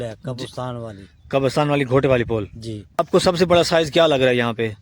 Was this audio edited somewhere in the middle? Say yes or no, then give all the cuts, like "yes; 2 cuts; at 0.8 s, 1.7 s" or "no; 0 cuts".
yes; 1 cut; at 3.0 s